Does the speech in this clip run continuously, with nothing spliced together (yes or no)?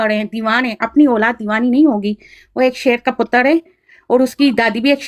yes